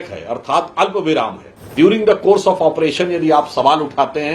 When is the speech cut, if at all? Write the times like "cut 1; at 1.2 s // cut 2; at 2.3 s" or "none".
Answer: cut 1; at 1.7 s